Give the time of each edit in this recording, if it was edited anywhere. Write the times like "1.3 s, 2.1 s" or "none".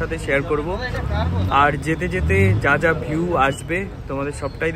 none